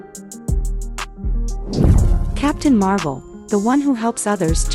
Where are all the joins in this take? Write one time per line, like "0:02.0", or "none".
0:02.2